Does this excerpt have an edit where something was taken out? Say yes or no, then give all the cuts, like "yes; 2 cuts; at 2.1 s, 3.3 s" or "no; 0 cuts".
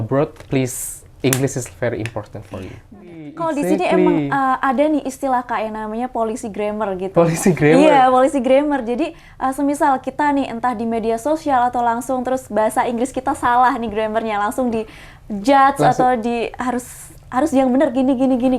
yes; 1 cut; at 3.4 s